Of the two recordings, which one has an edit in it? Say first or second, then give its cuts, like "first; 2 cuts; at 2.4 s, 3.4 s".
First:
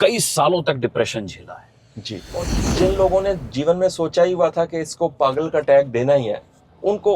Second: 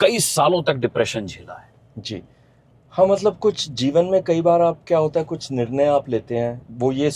first; 1 cut; at 2.6 s